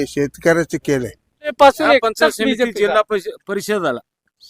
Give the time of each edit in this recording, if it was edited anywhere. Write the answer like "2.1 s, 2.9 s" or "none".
1.6 s